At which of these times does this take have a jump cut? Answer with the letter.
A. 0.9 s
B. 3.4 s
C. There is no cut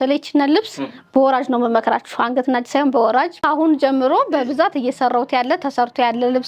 B